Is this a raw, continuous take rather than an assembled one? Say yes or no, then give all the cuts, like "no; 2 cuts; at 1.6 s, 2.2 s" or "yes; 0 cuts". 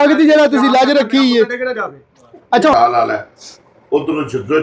no; 1 cut; at 2.7 s